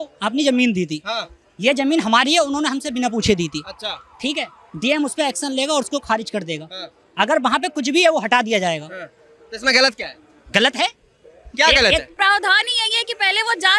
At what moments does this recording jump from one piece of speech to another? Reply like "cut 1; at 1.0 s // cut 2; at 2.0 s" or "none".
cut 1; at 12.1 s

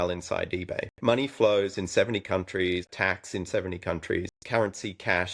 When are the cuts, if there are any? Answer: cut 1; at 0.9 s // cut 2; at 2.9 s // cut 3; at 4.3 s

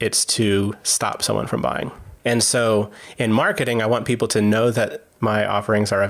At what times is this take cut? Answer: cut 1; at 5.0 s

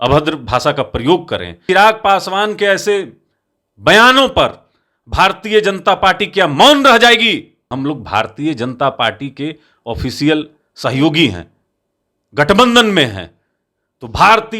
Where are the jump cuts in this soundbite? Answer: cut 1; at 1.6 s // cut 2; at 7.7 s

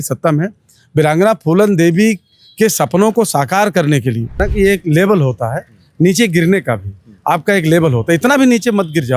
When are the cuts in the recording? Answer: cut 1; at 4.4 s

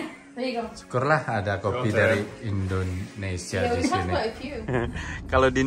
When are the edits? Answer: cut 1; at 4.5 s

